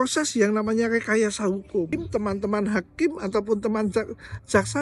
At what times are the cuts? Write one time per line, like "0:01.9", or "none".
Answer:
0:01.9